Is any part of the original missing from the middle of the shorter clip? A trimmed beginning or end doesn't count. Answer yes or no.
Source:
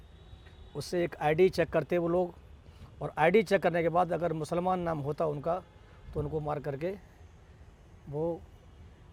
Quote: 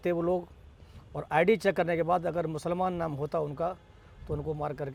no